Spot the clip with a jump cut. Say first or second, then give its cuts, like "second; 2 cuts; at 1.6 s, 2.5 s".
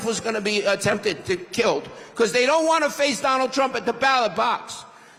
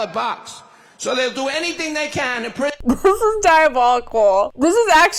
second; 1 cut; at 2.8 s